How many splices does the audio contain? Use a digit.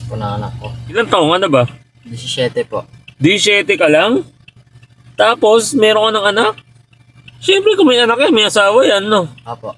1